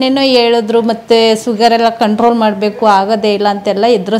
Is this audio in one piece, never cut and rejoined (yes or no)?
yes